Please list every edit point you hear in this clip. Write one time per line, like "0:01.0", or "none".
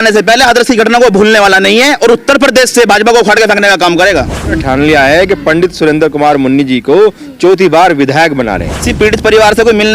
0:04.6
0:08.9